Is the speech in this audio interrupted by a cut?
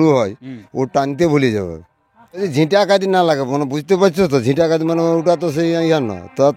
yes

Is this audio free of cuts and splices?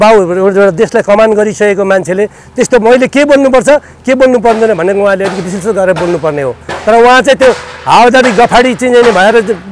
yes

